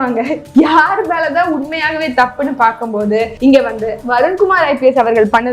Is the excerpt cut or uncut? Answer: cut